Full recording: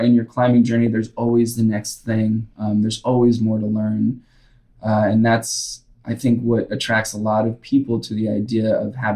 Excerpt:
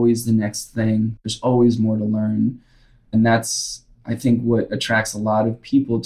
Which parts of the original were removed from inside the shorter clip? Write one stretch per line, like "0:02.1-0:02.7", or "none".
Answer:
0:02.6-0:02.9
0:04.7-0:05.1